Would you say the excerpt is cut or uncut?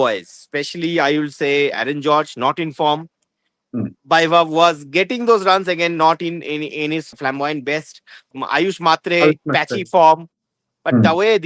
cut